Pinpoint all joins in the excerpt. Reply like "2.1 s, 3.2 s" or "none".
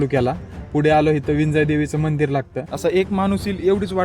2.6 s